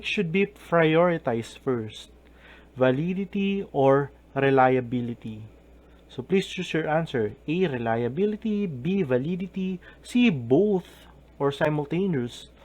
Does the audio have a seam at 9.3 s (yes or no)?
yes